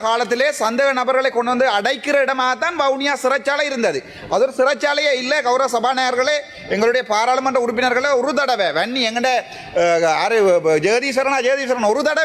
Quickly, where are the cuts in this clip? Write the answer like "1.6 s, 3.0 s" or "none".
none